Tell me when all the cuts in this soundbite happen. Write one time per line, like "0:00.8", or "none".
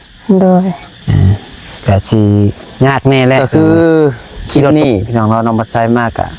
0:03.4